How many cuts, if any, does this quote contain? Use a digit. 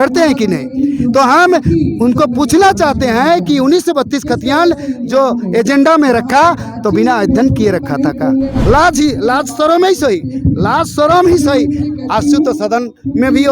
1